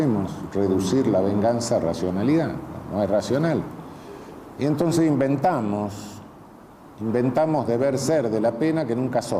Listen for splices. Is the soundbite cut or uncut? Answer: cut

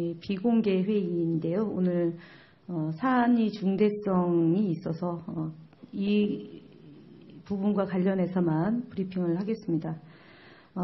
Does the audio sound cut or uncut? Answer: uncut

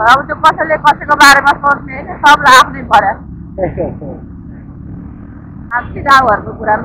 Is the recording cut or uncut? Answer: cut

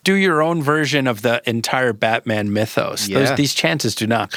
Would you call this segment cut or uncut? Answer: uncut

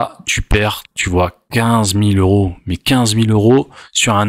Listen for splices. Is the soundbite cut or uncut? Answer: uncut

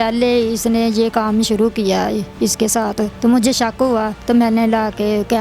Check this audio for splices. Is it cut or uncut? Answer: cut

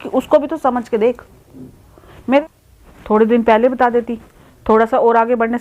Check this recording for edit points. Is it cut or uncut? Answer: cut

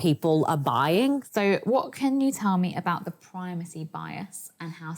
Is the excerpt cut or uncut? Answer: cut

